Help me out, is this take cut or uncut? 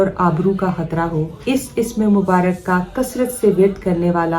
cut